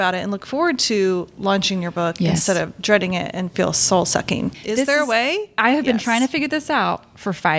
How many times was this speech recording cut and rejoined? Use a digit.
2